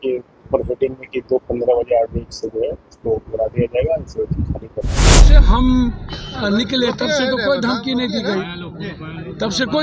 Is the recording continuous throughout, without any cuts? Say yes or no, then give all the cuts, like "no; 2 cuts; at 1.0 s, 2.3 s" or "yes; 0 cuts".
no; 1 cut; at 5.3 s